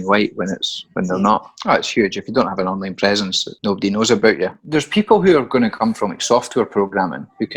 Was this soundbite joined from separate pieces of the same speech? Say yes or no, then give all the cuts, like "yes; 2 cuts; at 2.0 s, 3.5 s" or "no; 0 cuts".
yes; 2 cuts; at 1.5 s, 4.6 s